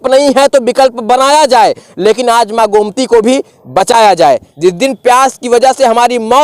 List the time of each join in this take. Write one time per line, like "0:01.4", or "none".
0:04.4